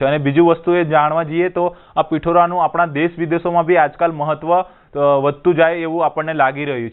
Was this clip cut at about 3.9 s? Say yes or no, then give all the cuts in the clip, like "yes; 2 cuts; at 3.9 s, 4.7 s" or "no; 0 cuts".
no; 0 cuts